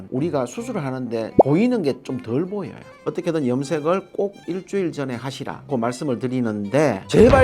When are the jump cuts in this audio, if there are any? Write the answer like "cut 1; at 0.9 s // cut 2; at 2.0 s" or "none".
cut 1; at 2.8 s

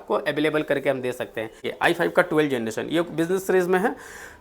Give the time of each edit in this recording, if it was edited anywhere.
cut 1; at 1.7 s

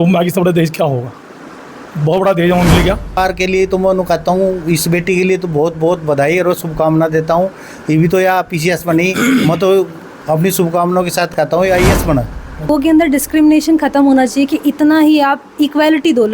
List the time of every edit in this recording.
cut 1; at 3.2 s // cut 2; at 12.7 s

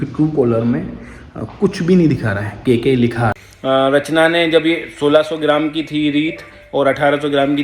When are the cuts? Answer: cut 1; at 3.5 s

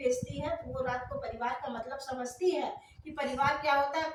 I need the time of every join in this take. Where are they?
none

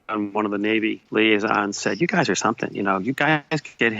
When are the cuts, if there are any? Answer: cut 1; at 1.0 s

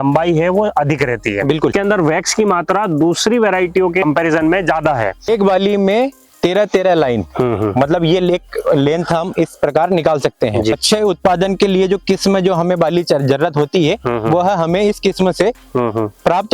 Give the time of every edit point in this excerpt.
cut 1; at 1.7 s // cut 2; at 5.3 s // cut 3; at 10.8 s

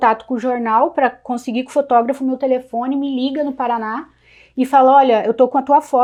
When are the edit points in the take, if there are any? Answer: none

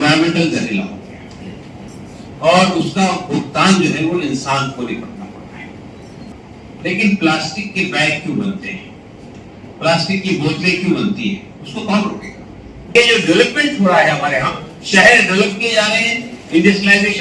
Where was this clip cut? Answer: cut 1; at 6.3 s // cut 2; at 12.9 s

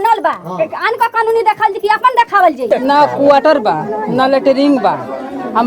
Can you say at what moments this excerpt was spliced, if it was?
cut 1; at 2.6 s

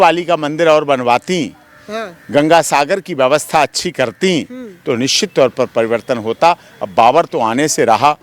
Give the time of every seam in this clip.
none

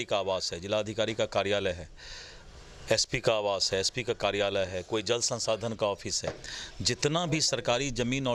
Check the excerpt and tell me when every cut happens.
none

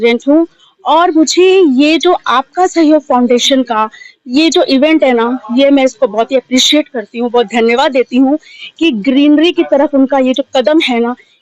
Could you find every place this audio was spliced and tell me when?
none

